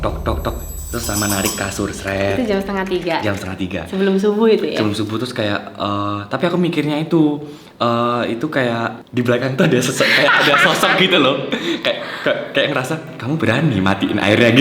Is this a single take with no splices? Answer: no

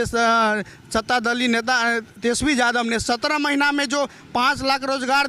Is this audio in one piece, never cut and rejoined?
yes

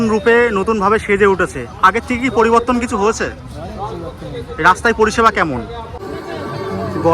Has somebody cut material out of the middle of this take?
yes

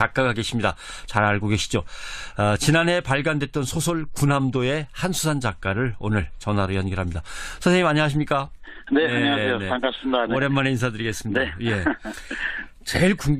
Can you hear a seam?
yes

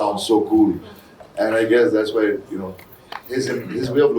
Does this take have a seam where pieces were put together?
no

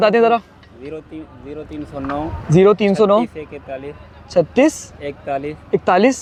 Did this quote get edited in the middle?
no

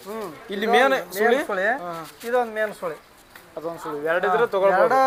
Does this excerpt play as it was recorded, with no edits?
yes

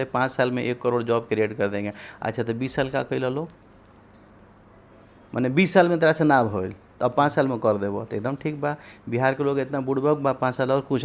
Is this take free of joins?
yes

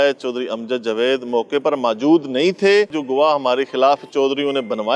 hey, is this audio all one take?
no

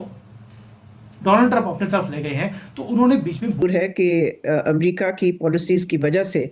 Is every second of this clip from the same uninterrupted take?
no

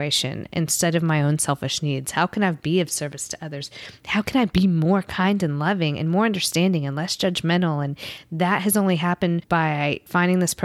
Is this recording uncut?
no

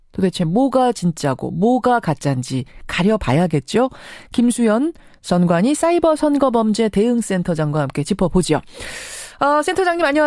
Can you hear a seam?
no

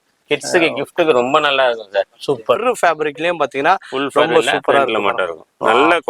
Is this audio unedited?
no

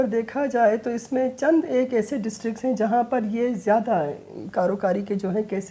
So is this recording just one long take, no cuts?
yes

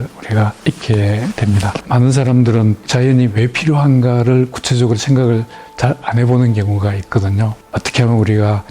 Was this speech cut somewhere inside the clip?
yes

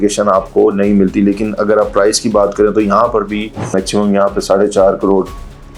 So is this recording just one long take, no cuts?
no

